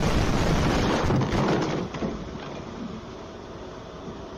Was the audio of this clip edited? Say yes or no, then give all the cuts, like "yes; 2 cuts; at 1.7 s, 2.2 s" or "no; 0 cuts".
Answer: no; 0 cuts